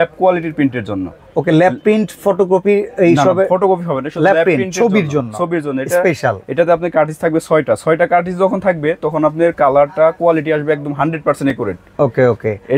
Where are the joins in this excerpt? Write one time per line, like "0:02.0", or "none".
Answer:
none